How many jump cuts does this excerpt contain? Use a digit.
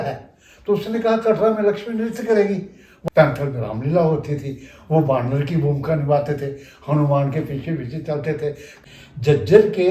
2